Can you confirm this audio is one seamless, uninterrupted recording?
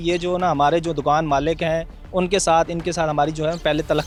yes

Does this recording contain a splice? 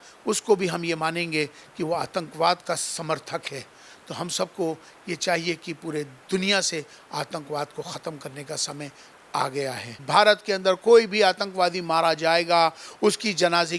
yes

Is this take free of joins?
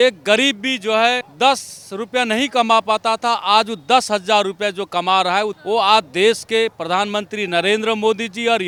yes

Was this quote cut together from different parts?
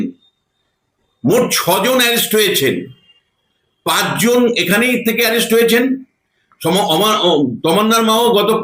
no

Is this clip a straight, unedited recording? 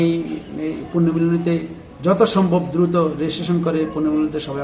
yes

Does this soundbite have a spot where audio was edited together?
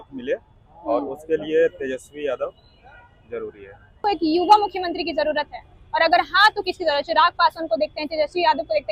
no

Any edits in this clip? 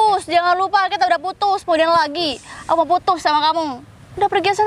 no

